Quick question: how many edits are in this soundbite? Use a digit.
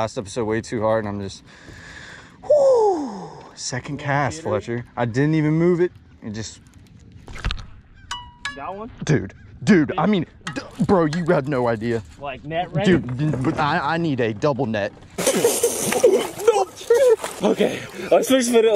2